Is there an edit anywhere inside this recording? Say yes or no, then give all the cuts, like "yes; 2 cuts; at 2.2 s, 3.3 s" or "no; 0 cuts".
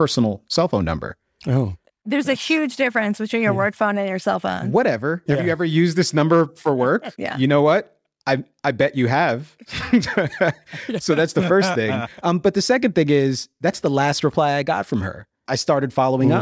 no; 0 cuts